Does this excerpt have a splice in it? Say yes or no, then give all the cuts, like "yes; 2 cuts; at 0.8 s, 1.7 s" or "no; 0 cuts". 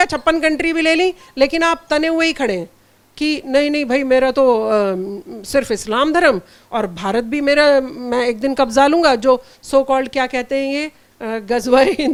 no; 0 cuts